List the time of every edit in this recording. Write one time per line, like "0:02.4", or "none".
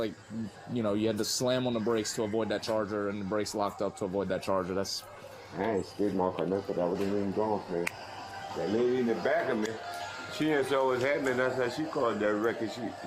0:05.4